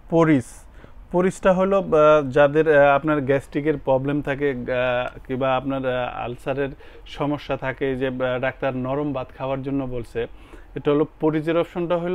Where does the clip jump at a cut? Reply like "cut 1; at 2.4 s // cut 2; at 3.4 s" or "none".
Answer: none